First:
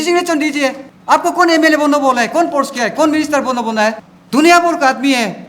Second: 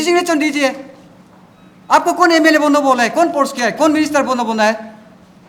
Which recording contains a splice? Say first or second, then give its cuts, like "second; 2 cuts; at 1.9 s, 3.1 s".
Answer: first; 2 cuts; at 0.9 s, 4.1 s